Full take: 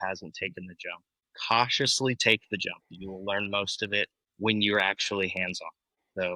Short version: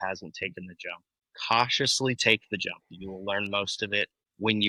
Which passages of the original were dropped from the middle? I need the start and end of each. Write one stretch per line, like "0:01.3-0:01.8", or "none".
none